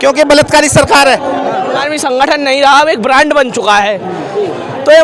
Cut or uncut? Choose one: cut